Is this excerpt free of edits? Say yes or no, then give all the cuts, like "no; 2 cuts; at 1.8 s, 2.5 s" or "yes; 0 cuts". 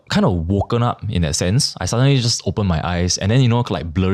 yes; 0 cuts